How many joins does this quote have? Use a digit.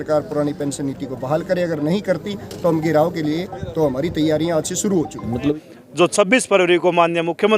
1